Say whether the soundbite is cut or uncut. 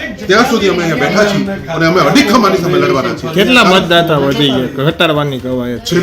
uncut